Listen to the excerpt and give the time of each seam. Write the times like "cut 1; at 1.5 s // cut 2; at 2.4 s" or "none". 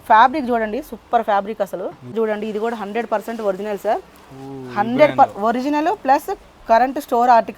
cut 1; at 2.1 s